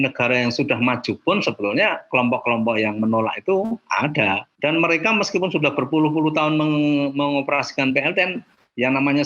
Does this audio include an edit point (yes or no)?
yes